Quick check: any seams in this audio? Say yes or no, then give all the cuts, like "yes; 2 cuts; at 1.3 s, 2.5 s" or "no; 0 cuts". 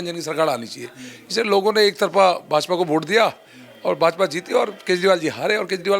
no; 0 cuts